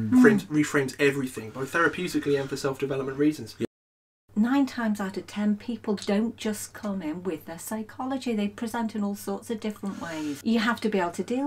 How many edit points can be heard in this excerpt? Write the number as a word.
two